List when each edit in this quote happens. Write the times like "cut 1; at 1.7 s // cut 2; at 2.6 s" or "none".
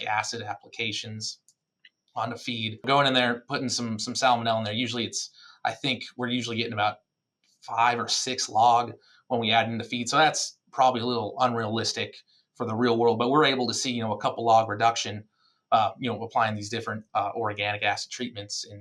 cut 1; at 2.8 s

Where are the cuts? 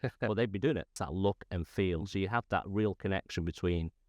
cut 1; at 0.9 s

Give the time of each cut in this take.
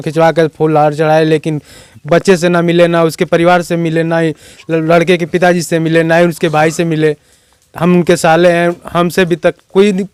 none

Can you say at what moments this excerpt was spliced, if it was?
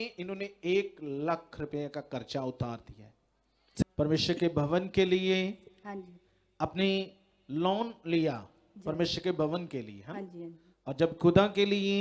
cut 1; at 3.8 s

